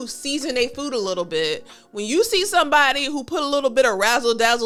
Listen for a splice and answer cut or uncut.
uncut